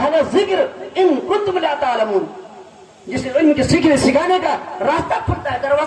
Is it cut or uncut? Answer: uncut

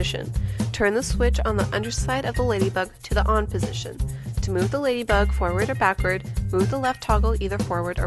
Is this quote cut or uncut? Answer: cut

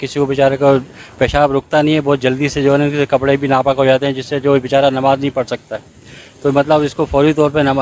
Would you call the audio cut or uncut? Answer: uncut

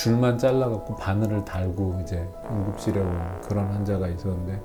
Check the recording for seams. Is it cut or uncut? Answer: uncut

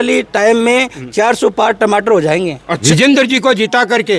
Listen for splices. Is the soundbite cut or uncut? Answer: cut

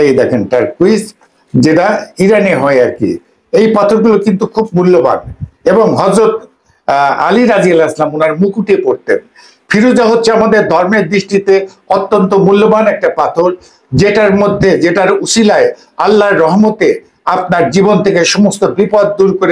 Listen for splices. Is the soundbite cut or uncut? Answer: uncut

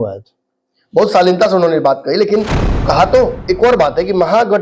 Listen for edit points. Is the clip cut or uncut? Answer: cut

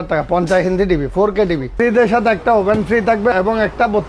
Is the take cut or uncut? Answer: cut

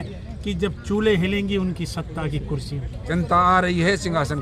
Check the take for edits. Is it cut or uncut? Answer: cut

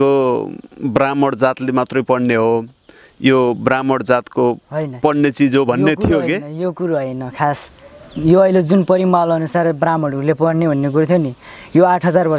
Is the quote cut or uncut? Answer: uncut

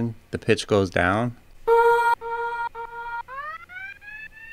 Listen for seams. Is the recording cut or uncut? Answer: cut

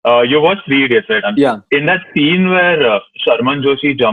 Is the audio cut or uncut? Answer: cut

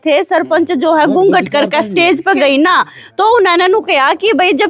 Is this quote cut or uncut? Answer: uncut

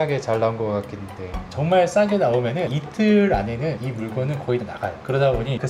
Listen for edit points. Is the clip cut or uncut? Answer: cut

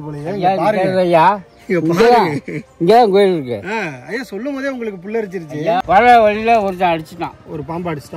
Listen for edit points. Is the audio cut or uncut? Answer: cut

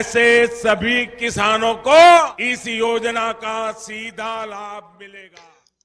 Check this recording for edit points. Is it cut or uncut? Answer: uncut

